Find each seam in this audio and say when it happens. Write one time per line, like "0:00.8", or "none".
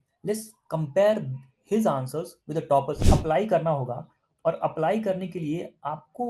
0:03.0